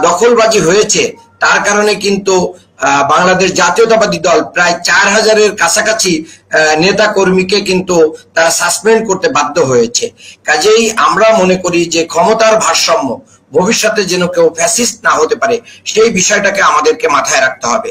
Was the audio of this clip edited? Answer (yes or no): no